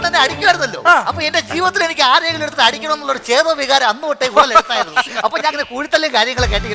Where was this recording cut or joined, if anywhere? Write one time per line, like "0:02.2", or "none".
none